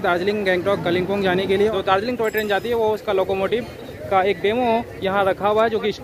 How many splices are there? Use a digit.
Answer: 1